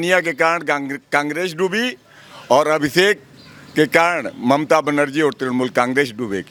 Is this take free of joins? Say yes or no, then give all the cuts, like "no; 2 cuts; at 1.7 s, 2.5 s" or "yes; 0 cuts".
yes; 0 cuts